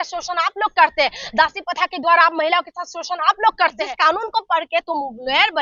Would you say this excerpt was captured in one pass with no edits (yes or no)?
no